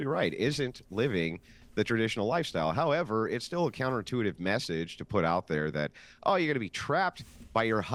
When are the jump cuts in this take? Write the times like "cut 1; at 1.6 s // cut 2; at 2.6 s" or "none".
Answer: none